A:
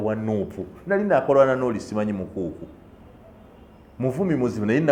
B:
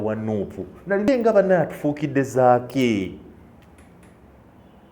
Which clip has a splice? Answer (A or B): B